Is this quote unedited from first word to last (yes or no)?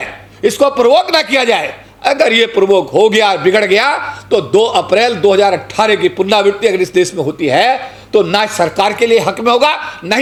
yes